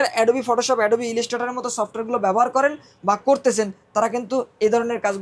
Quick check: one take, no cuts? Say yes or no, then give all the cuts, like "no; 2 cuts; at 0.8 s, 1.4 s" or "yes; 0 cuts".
yes; 0 cuts